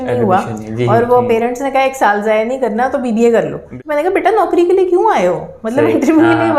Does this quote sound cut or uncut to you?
cut